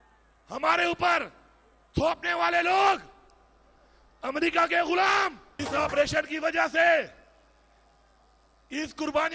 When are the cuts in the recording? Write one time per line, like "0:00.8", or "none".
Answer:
0:05.5

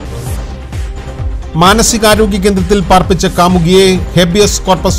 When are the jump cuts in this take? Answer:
0:00.9

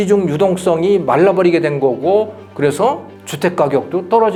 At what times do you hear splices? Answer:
none

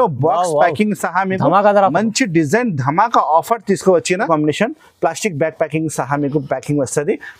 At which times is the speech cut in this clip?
0:04.3

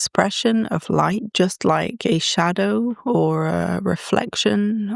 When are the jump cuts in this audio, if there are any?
0:01.3

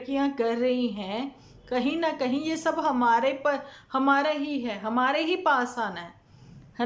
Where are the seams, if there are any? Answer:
none

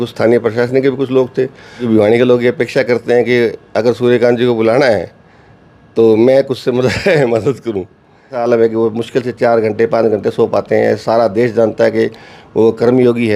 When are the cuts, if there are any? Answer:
0:01.8
0:08.4

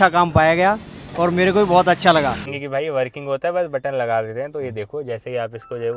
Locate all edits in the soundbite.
0:02.5

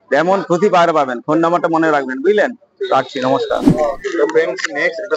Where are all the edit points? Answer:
0:03.7

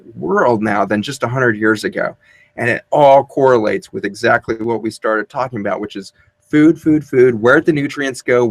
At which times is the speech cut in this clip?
none

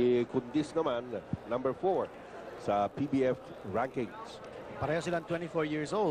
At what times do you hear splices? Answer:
0:02.8

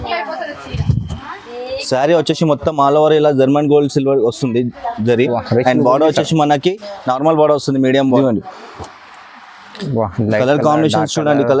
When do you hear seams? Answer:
0:08.2

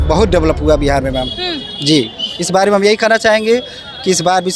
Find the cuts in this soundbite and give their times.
none

